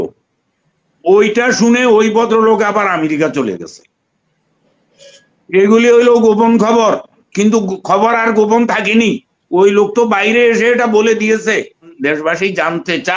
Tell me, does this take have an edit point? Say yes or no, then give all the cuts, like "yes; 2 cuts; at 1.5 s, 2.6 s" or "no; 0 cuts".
yes; 1 cut; at 11.9 s